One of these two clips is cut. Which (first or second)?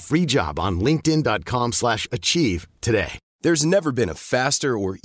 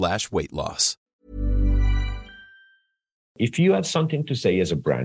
second